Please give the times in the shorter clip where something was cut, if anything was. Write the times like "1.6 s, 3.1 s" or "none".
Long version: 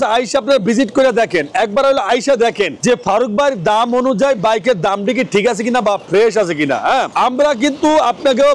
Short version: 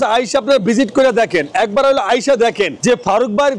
none